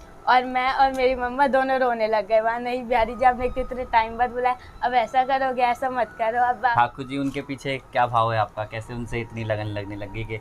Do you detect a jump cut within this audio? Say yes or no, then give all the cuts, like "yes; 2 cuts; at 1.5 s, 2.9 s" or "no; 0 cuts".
yes; 1 cut; at 6.7 s